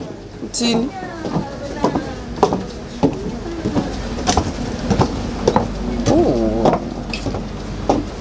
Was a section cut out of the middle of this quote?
no; 0 cuts

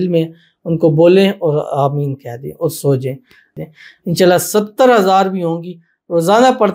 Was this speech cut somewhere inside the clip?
yes; 1 cut; at 3.5 s

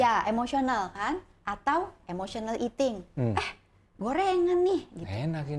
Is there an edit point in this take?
no; 0 cuts

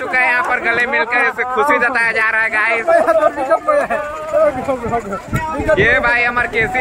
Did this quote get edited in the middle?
no; 0 cuts

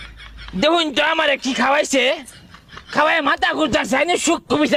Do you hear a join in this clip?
no; 0 cuts

